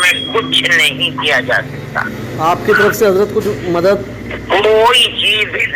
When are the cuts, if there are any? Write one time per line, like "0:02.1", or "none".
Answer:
none